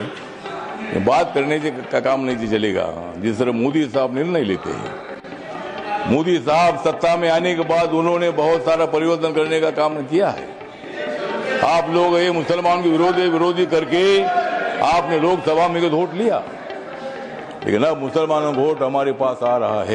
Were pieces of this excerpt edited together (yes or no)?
no